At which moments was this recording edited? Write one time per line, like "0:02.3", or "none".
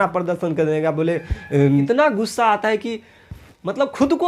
0:01.9

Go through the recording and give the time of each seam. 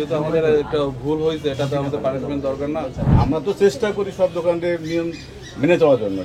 0:03.1

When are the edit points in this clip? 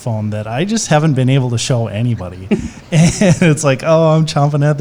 none

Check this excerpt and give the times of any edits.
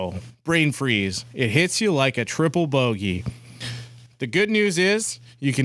none

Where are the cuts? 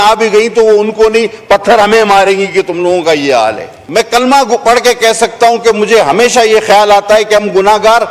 0:03.7

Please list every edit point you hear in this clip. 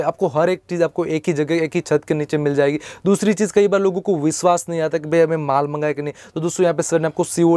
none

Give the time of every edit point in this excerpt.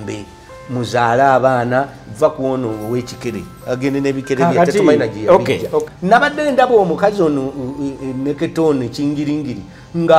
0:05.9

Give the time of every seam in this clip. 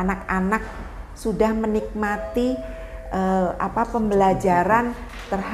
none

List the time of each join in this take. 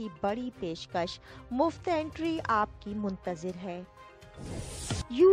0:03.9

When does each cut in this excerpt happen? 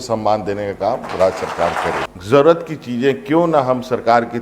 0:02.1

